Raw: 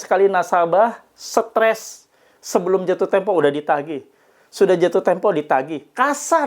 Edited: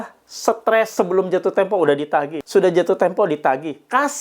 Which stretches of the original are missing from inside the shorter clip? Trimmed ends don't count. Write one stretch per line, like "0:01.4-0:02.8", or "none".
0:01.8-0:02.5
0:03.9-0:04.4